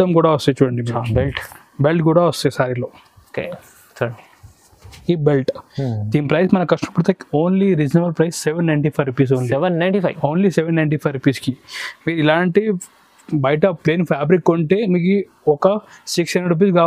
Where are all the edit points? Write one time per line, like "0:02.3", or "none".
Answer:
none